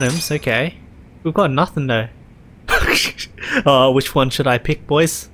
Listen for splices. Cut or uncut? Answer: uncut